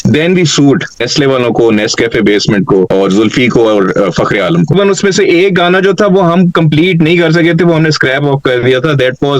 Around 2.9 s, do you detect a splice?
yes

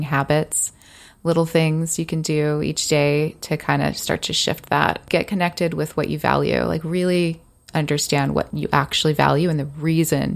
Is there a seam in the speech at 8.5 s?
yes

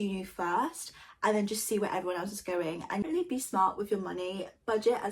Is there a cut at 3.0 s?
yes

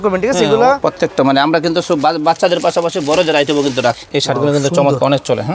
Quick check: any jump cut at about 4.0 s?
yes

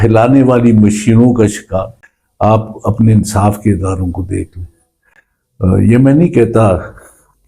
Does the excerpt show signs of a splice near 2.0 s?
yes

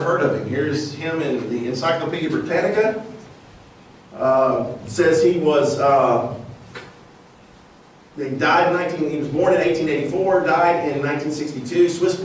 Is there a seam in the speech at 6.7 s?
yes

